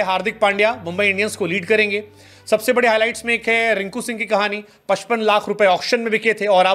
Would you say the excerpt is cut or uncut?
uncut